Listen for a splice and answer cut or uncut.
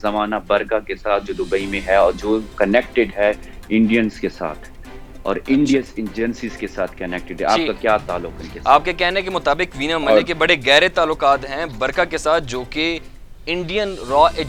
uncut